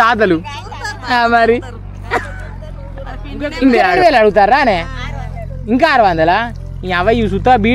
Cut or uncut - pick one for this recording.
cut